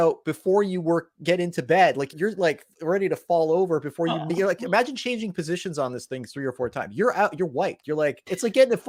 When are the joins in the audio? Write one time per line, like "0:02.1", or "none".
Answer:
none